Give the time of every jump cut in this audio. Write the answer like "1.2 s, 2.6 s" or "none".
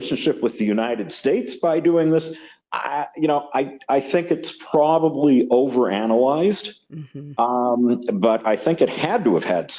none